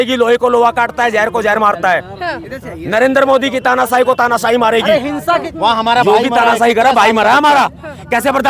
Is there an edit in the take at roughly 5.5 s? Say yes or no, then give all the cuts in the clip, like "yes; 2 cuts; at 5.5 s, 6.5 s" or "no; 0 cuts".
yes; 1 cut; at 5.5 s